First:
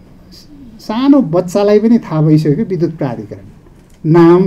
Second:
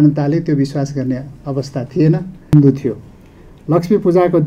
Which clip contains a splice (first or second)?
second